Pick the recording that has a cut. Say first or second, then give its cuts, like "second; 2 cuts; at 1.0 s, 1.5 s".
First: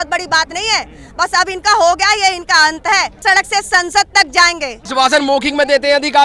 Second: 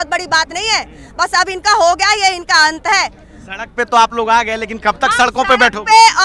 first; 2 cuts; at 3.2 s, 4.8 s